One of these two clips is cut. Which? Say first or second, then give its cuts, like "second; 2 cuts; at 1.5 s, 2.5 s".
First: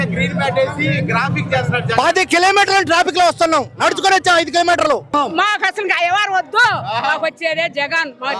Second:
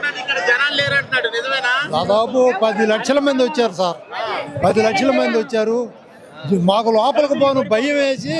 first; 1 cut; at 5.1 s